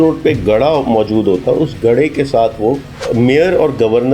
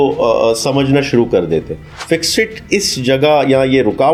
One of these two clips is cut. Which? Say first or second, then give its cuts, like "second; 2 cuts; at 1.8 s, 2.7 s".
first; 1 cut; at 2.9 s